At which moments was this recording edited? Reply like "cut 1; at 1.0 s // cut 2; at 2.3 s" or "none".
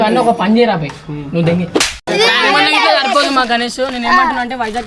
cut 1; at 2.0 s